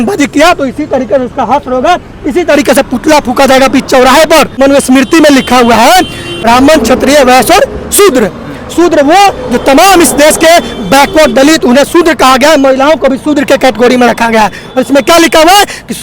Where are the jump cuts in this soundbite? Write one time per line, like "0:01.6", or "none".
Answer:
0:04.5
0:06.3